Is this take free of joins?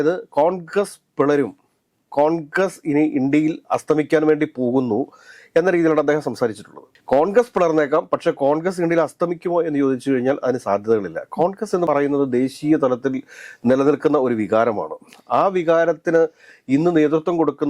yes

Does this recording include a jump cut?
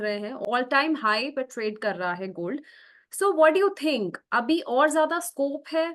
no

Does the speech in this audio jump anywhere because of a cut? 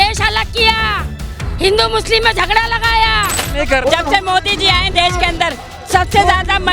yes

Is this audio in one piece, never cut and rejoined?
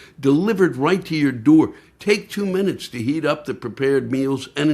no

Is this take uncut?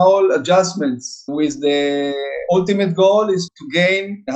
no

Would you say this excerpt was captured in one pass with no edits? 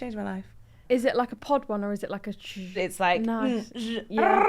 no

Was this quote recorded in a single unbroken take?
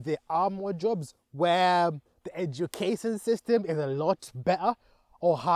yes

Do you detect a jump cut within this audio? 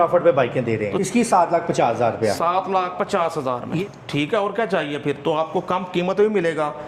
yes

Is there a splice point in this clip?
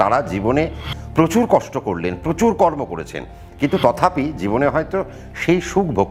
no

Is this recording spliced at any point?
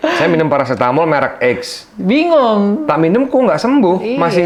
no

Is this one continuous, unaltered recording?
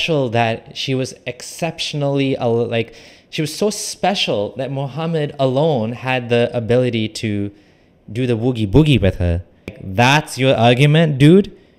no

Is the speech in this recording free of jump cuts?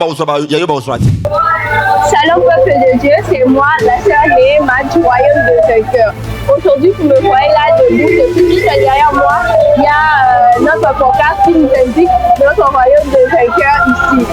no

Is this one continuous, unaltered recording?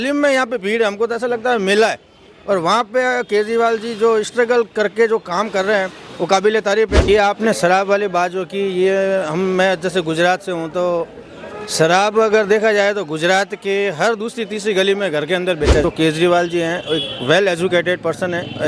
no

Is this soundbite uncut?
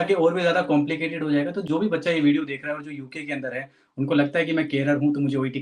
yes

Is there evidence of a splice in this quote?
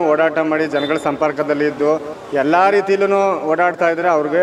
no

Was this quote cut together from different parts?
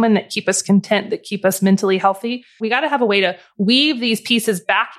yes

